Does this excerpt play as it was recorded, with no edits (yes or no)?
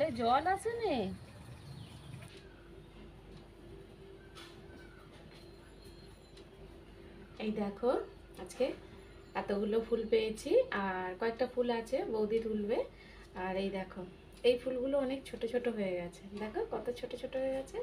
no